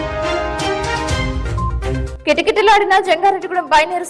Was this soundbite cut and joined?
no; 0 cuts

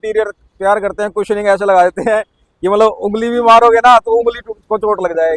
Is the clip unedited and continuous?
yes; 0 cuts

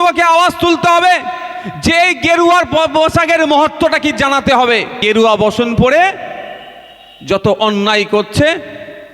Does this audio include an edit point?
yes; 1 cut; at 5.0 s

